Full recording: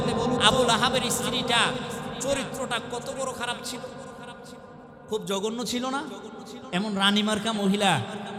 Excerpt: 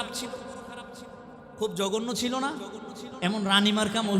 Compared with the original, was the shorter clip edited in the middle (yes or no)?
no